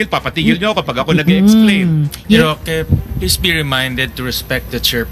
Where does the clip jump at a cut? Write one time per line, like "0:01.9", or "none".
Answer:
0:02.4